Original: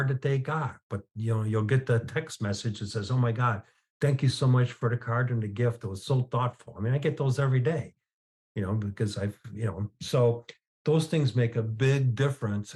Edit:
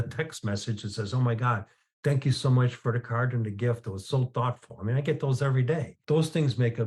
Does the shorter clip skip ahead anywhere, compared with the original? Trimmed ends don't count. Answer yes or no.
yes